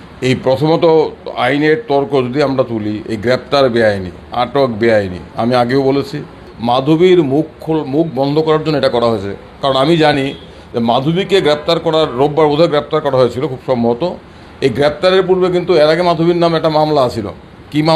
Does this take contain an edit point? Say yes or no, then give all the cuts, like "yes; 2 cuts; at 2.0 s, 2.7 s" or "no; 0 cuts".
yes; 1 cut; at 6.5 s